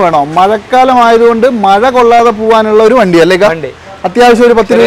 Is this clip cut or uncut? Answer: uncut